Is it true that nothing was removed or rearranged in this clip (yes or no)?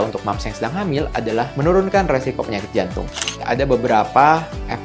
no